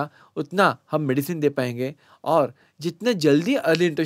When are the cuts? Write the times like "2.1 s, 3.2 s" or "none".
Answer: none

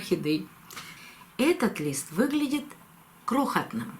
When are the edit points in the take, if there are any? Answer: 0.9 s

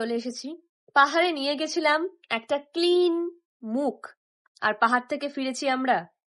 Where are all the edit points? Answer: none

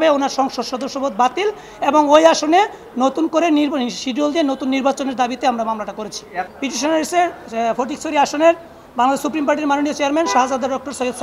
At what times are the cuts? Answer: 6.4 s

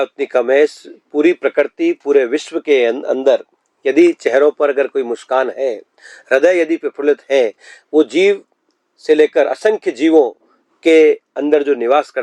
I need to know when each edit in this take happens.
none

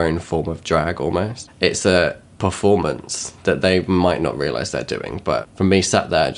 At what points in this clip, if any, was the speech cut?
1.4 s, 2.3 s, 5.5 s

